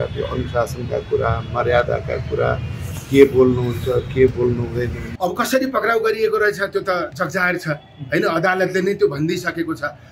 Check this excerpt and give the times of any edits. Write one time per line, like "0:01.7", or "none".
0:05.0